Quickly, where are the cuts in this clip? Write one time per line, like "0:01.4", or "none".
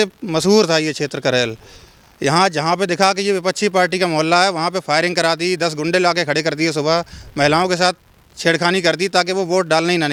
none